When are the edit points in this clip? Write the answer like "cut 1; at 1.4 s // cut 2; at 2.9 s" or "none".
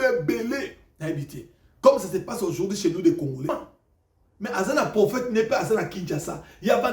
cut 1; at 3.5 s